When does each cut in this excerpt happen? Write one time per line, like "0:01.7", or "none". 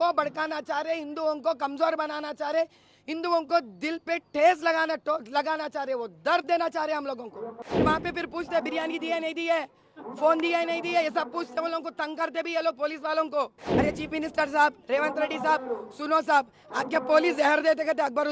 0:07.8
0:13.6